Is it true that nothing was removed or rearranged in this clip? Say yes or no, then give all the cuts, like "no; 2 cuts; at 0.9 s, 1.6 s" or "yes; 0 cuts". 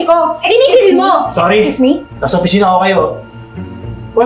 yes; 0 cuts